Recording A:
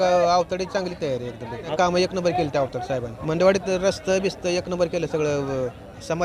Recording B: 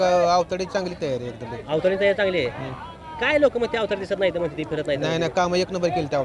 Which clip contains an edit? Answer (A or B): A